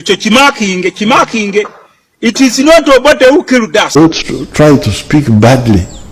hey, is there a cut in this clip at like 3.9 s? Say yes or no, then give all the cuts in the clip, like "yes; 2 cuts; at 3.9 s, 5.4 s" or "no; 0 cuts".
yes; 1 cut; at 3.9 s